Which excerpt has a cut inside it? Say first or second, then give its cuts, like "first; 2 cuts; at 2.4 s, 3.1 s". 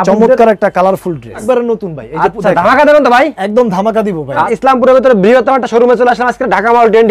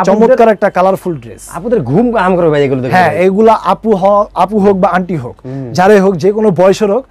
first; 2 cuts; at 1.4 s, 4.5 s